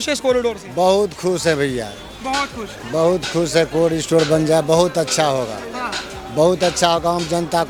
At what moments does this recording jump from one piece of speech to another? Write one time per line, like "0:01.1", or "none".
none